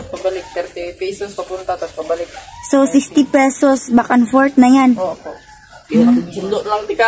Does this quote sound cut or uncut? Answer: uncut